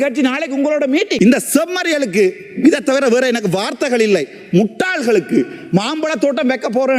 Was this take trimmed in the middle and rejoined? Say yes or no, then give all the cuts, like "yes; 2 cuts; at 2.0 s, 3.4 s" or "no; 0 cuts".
yes; 1 cut; at 1.1 s